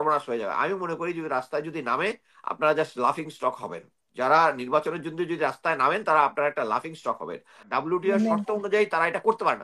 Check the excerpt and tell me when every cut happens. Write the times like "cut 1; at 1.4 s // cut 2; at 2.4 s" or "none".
cut 1; at 7.6 s